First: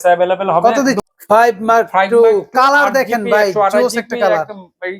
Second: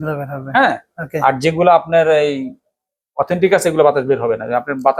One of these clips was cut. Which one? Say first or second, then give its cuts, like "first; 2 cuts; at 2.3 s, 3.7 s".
first; 1 cut; at 1.0 s